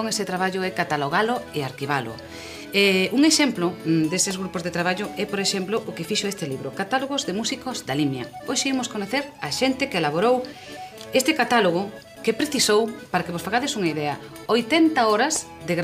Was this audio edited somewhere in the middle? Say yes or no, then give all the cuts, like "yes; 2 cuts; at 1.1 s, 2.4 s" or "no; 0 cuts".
no; 0 cuts